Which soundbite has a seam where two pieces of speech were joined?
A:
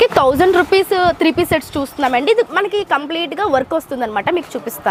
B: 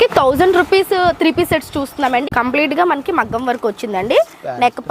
B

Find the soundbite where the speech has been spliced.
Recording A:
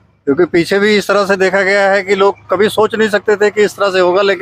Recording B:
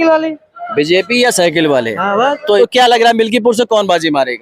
B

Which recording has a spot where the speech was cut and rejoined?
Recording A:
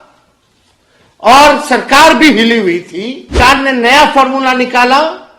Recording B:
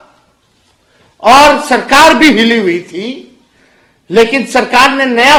A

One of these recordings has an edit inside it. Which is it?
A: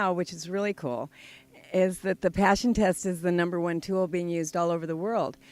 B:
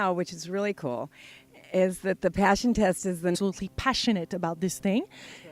A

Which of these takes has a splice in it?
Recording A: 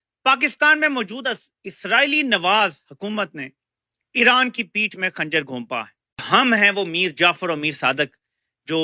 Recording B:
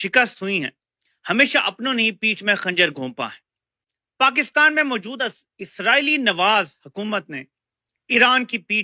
A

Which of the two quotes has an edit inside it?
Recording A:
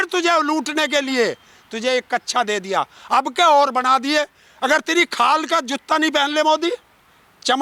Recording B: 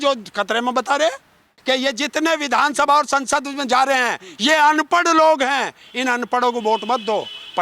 B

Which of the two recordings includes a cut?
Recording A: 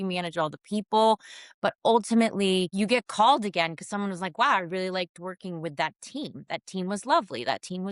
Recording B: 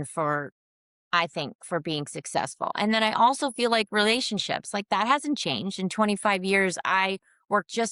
A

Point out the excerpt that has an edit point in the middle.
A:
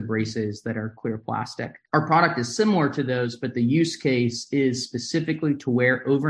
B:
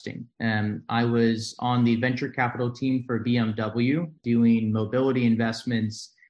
B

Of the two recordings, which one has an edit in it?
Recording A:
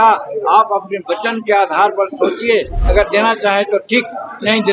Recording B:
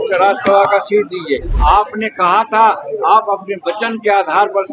B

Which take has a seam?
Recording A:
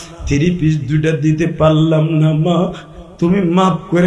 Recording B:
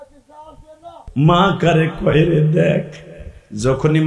B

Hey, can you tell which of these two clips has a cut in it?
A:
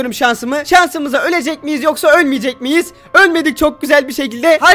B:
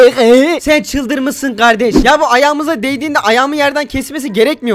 B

